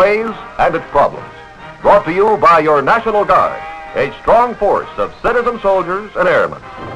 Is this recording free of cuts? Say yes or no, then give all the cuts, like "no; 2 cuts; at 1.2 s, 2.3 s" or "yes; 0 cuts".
yes; 0 cuts